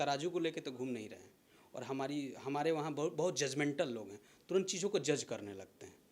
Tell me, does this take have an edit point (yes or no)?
no